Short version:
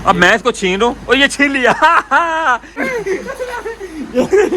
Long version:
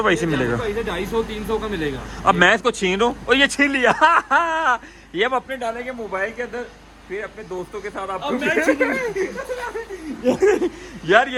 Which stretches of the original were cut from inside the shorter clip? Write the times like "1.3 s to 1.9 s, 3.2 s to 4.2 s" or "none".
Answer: 5.0 s to 8.9 s